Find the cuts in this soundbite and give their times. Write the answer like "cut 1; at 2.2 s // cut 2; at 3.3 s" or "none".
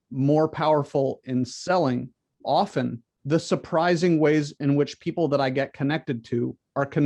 cut 1; at 2.4 s // cut 2; at 3.1 s